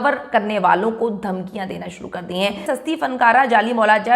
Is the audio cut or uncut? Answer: cut